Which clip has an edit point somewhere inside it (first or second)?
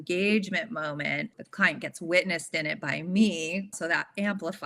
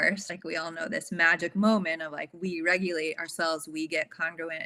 first